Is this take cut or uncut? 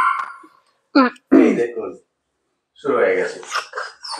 uncut